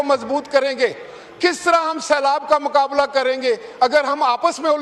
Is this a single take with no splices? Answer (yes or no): yes